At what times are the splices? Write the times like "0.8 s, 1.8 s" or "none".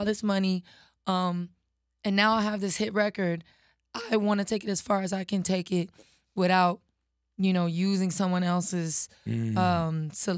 none